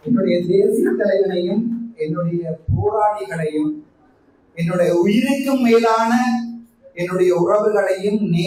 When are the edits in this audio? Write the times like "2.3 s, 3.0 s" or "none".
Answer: none